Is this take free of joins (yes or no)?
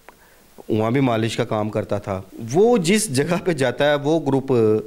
no